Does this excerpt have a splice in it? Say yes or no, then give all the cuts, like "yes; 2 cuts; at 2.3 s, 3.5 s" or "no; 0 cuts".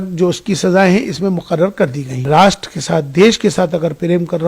yes; 1 cut; at 2.3 s